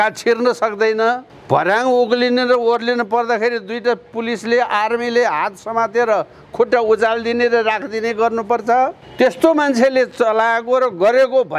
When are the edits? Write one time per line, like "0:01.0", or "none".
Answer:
0:01.3
0:09.0